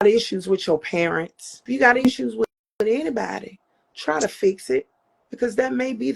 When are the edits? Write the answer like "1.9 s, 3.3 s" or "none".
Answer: 1.7 s